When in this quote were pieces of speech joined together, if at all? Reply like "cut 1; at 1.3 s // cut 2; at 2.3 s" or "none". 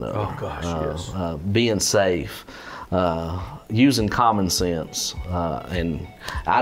none